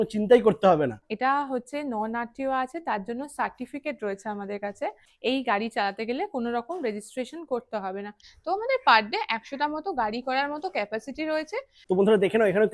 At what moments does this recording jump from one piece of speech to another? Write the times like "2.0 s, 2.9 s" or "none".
1.1 s, 5.1 s, 8.3 s, 11.8 s